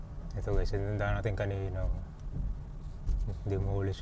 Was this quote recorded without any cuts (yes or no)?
yes